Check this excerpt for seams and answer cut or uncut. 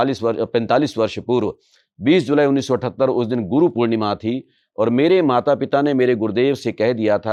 uncut